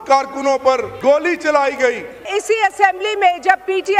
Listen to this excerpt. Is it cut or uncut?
cut